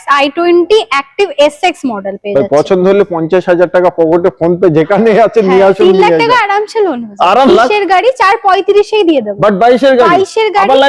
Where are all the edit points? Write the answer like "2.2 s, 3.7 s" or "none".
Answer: 7.5 s